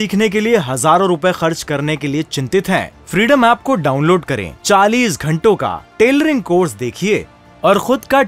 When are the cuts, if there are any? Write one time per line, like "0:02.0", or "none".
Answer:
none